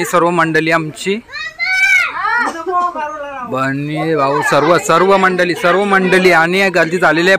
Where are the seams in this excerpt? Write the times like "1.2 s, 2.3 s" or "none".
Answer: none